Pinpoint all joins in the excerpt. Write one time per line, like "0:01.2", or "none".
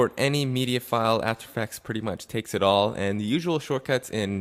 none